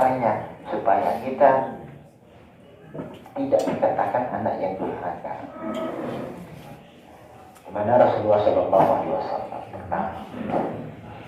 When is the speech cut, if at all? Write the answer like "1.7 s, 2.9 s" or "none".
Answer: none